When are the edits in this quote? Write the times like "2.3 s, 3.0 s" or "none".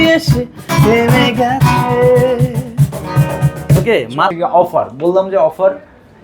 4.3 s